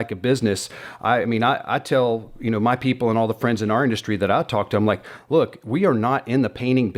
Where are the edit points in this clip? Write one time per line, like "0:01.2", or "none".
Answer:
none